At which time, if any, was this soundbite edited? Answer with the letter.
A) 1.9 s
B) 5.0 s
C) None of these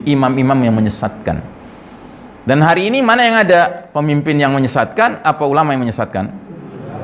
C